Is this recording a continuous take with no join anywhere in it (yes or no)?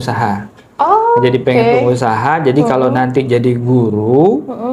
yes